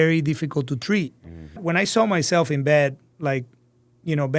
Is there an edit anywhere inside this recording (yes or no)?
yes